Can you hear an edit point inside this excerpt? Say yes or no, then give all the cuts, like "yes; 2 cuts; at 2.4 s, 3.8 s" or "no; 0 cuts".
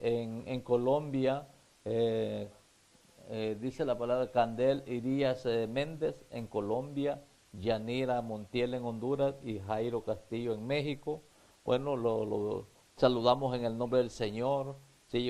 yes; 1 cut; at 12.0 s